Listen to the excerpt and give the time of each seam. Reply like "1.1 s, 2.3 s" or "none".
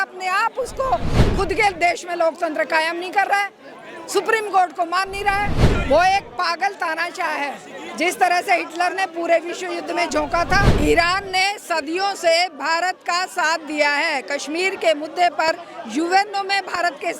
1.1 s, 5.7 s, 10.7 s